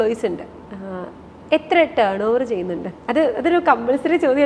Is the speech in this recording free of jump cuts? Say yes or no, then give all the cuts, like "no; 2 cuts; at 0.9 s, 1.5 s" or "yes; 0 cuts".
yes; 0 cuts